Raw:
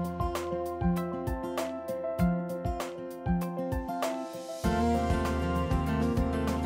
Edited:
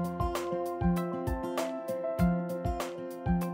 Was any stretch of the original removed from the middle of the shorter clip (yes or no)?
no